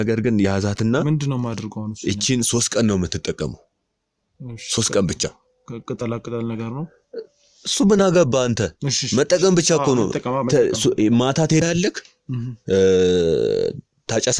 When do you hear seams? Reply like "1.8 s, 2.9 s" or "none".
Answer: none